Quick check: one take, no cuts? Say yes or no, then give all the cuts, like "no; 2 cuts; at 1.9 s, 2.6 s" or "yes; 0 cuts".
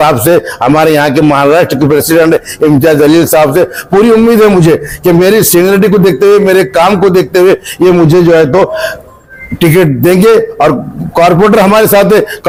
yes; 0 cuts